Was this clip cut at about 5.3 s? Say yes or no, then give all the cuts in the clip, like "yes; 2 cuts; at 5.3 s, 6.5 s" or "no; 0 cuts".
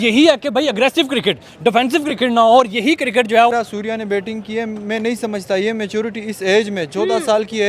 no; 1 cut; at 3.5 s